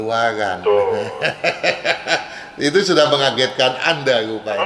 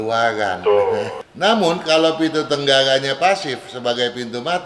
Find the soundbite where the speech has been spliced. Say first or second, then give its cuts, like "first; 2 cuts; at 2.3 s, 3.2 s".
second; 1 cut; at 1.1 s